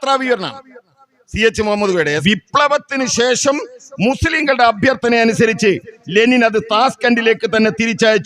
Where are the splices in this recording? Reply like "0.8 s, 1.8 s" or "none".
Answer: 2.2 s